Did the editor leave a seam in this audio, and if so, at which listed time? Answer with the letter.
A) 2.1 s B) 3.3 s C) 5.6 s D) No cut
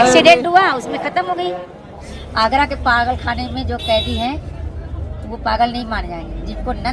A